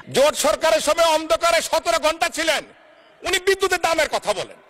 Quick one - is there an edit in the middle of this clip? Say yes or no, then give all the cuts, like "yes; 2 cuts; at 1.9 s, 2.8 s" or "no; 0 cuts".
no; 0 cuts